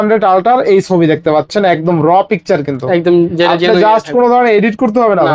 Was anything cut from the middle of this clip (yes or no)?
no